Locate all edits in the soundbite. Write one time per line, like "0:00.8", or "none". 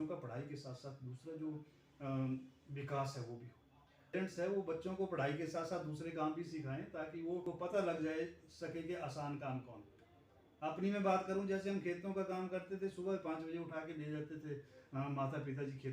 0:04.1
0:07.4